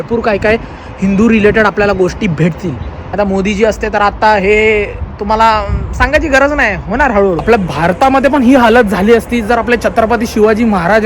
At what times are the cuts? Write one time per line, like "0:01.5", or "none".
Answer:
0:02.9
0:07.4